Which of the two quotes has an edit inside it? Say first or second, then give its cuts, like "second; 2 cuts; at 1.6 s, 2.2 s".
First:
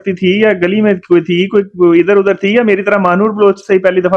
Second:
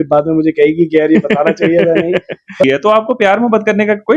second; 1 cut; at 2.6 s